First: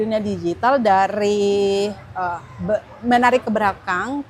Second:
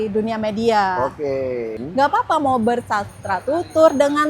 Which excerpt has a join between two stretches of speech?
second; 1 cut; at 1.8 s

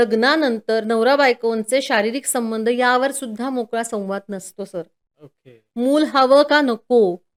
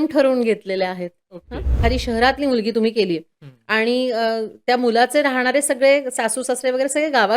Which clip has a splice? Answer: second; 1 cut; at 1.7 s

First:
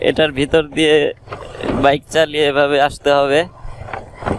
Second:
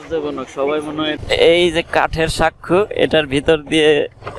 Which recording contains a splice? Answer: second; 1 cut; at 1.2 s

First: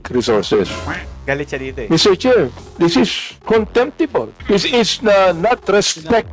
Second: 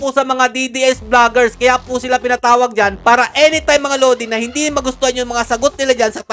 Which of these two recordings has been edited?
first; 1 cut; at 4.3 s

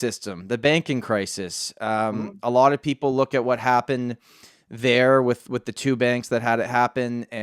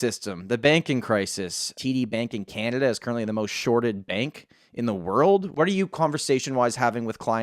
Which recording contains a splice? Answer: second; 2 cuts; at 1.8 s, 5.5 s

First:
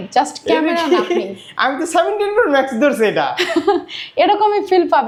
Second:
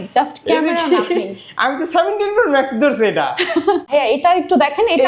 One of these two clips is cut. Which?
second; 1 cut; at 3.9 s

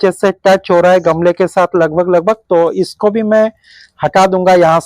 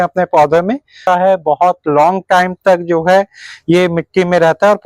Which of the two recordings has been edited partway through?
second; 1 cut; at 1.0 s

